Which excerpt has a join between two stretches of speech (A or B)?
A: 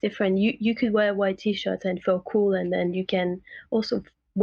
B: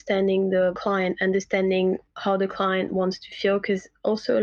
B